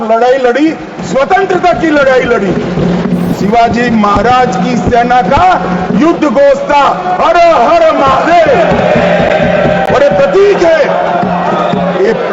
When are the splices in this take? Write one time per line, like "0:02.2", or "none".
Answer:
0:03.3